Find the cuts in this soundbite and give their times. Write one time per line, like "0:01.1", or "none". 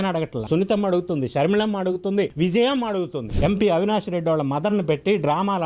0:03.3

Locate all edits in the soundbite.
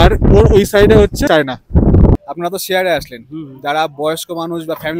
0:01.2
0:02.2

